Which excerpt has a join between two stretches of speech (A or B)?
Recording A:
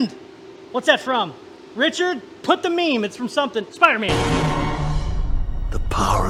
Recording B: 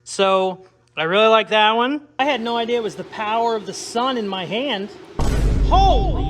B